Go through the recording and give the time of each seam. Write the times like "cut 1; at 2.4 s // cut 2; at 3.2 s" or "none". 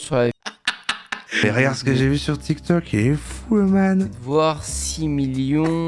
cut 1; at 1.4 s